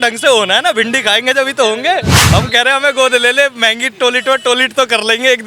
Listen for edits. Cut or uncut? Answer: cut